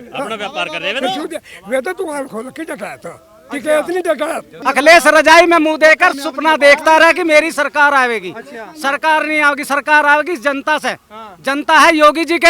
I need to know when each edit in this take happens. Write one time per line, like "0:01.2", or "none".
0:04.6